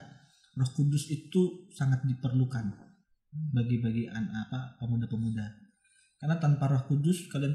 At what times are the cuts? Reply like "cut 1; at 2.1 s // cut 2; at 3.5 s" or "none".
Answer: none